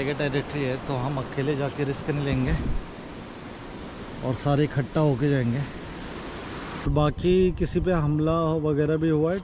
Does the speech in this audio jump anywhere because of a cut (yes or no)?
yes